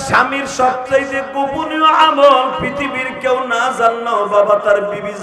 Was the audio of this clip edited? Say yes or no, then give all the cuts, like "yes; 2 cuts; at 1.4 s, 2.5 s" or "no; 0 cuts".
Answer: no; 0 cuts